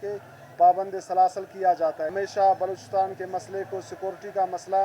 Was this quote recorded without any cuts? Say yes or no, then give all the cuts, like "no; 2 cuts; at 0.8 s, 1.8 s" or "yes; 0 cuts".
no; 1 cut; at 2.1 s